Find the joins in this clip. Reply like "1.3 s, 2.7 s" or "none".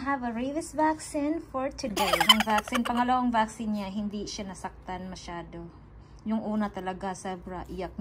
2.2 s